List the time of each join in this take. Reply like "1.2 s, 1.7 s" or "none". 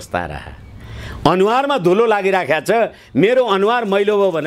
none

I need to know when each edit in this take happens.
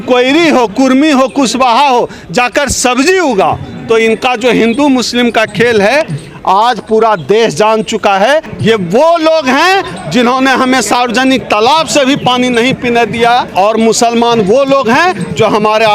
8.5 s

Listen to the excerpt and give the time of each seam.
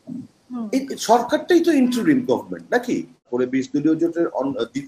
3.3 s

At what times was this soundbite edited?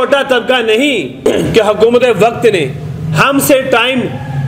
1.3 s

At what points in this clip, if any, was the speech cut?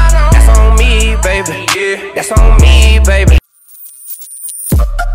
3.4 s

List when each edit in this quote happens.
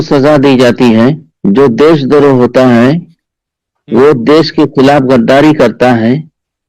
1.3 s

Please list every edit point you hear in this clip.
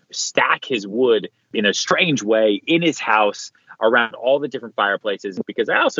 1.5 s

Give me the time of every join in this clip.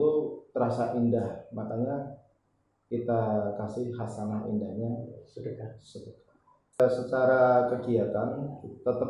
6.8 s

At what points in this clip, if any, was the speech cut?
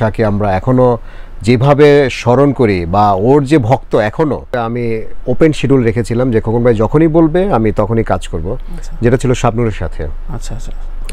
4.6 s

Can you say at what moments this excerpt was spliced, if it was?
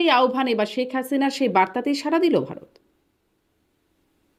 none

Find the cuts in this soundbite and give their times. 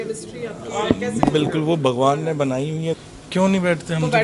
3.0 s

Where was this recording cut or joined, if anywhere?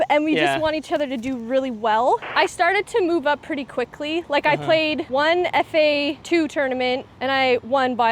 2.3 s, 5.0 s, 6.2 s, 7.1 s

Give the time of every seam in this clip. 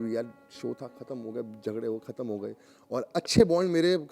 2.7 s

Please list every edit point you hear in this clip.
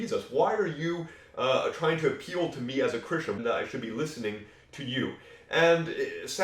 3.4 s

